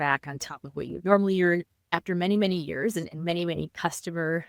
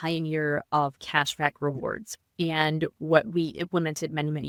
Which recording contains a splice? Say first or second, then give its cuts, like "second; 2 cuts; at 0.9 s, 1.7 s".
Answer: first; 1 cut; at 1.8 s